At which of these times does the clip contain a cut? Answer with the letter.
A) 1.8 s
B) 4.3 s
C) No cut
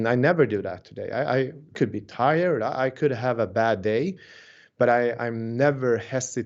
A